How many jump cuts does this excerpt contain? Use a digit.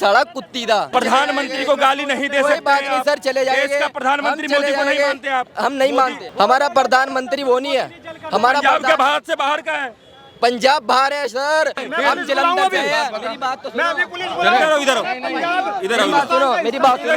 3